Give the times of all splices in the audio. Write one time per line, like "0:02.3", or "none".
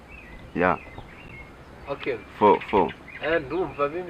none